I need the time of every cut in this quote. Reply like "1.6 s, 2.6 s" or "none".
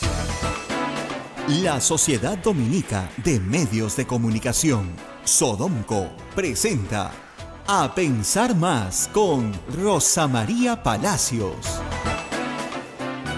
1.0 s